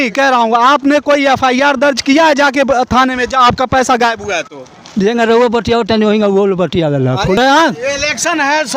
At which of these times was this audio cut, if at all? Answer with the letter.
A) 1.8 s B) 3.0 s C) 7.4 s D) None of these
C